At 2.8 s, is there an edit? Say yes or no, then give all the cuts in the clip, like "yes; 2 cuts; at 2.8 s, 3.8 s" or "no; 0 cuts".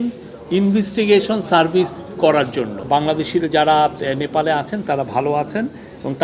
yes; 1 cut; at 2.8 s